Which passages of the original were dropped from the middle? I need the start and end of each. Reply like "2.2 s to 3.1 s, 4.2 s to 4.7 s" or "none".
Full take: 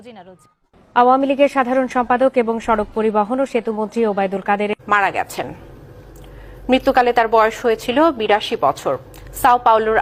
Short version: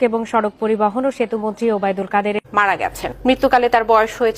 5.4 s to 6.5 s